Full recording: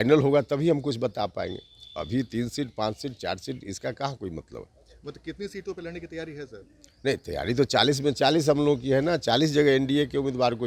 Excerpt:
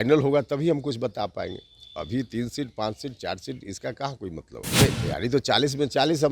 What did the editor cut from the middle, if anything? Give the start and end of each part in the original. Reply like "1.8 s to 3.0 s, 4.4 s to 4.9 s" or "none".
4.8 s to 7.1 s